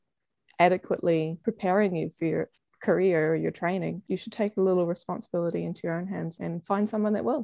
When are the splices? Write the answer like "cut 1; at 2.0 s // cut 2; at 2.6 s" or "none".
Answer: cut 1; at 1.3 s // cut 2; at 2.6 s // cut 3; at 4.0 s // cut 4; at 6.3 s